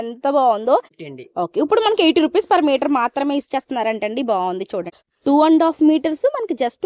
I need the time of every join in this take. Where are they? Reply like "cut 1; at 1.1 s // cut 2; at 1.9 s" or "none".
cut 1; at 0.9 s // cut 2; at 4.9 s